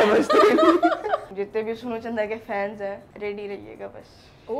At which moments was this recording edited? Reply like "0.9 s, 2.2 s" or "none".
1.3 s, 3.1 s